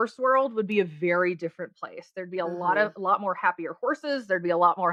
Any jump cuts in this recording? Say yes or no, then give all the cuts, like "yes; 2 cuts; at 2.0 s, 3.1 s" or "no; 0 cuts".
no; 0 cuts